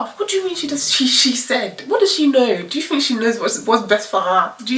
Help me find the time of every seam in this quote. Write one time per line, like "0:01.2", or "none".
none